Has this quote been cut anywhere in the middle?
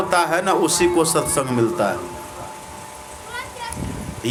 no; 0 cuts

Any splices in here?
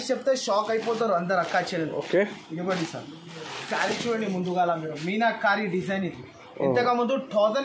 no; 0 cuts

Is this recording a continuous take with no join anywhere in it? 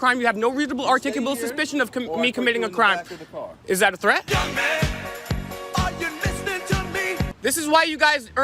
no; 2 cuts; at 4.2 s, 7.3 s

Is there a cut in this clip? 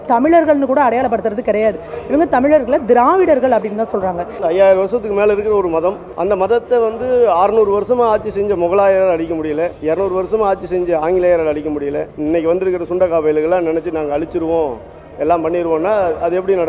yes; 4 cuts; at 4.4 s, 6.1 s, 9.8 s, 12.1 s

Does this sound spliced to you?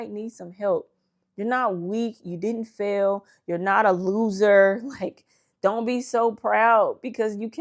no; 0 cuts

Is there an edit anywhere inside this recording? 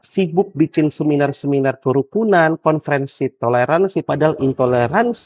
yes; 1 cut; at 4.0 s

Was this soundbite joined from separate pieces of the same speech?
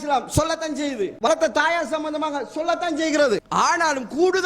yes; 2 cuts; at 1.3 s, 3.5 s

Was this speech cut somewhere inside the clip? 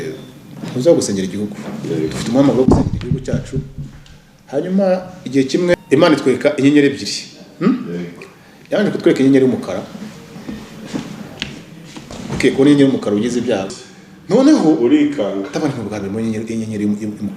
yes; 2 cuts; at 5.7 s, 13.7 s

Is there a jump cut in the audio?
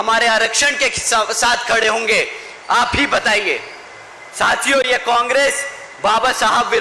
no; 0 cuts

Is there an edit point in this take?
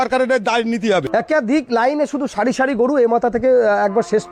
yes; 1 cut; at 1.1 s

